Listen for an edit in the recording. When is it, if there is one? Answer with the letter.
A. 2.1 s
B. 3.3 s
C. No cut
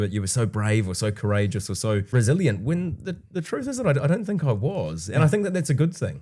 A